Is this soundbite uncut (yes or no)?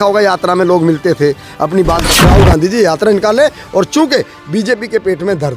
no